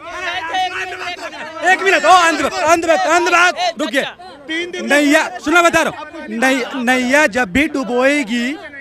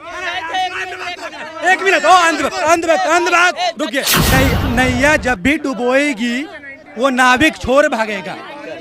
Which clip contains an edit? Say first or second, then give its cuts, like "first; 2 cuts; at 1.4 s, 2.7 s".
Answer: second; 1 cut; at 4.2 s